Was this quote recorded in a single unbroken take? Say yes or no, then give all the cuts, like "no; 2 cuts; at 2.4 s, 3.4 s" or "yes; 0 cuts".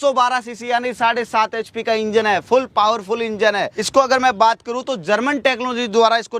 yes; 0 cuts